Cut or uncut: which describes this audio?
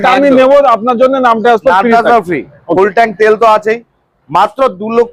uncut